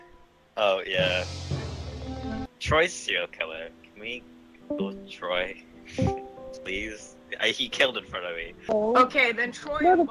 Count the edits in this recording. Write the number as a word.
two